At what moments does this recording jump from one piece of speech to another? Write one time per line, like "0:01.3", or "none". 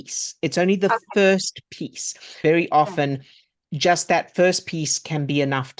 0:02.4